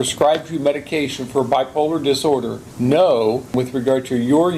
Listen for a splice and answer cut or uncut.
cut